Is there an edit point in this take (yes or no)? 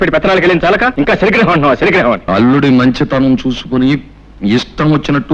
yes